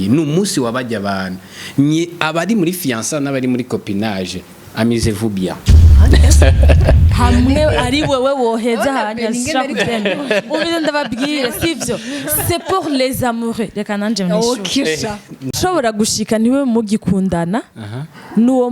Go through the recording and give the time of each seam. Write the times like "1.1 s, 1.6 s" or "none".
15.5 s